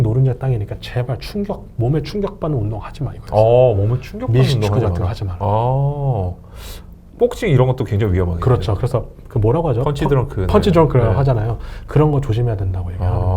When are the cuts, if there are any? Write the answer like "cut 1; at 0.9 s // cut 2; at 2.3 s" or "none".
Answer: none